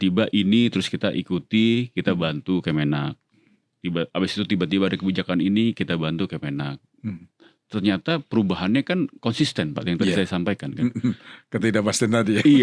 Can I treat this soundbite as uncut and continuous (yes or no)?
yes